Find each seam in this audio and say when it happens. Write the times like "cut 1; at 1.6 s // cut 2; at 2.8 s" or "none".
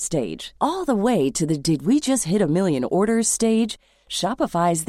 none